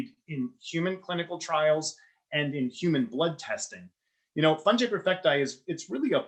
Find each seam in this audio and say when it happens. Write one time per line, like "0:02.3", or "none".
none